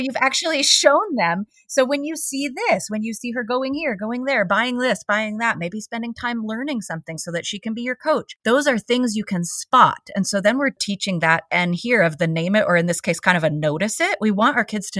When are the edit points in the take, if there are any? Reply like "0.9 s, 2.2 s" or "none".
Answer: 8.3 s, 10.8 s